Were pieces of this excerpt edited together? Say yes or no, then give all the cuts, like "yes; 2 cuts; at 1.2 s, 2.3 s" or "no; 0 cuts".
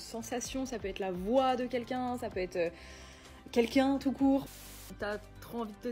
yes; 1 cut; at 4.9 s